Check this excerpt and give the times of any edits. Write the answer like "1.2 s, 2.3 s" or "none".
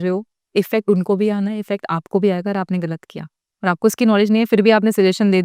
none